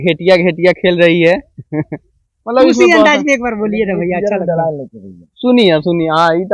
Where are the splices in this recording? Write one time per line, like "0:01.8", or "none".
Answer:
none